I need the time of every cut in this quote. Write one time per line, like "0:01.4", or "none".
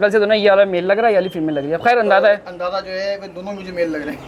none